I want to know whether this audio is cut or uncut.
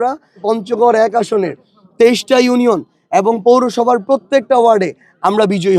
uncut